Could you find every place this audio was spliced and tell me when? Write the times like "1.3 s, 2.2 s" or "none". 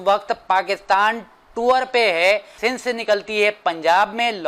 2.5 s